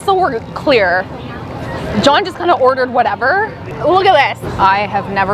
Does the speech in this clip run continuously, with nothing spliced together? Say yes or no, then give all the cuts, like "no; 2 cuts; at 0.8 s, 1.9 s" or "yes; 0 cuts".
no; 1 cut; at 4.5 s